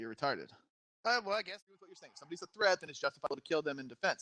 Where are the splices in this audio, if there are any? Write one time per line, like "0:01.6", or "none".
0:01.8